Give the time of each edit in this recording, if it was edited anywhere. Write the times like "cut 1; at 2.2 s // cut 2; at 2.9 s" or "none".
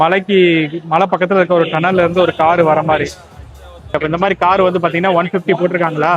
cut 1; at 3.9 s